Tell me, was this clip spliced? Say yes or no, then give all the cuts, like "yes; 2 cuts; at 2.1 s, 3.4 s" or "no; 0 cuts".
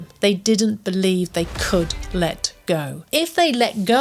yes; 1 cut; at 3.0 s